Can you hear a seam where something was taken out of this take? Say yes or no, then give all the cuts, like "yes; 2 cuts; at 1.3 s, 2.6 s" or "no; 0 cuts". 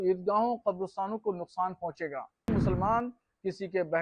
yes; 1 cut; at 2.5 s